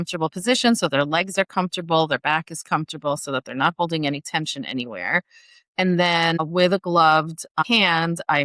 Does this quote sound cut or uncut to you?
cut